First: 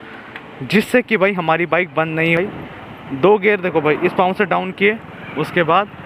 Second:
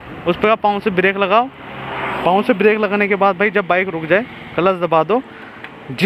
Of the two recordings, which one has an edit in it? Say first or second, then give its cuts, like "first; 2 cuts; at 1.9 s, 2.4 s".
first; 1 cut; at 2.4 s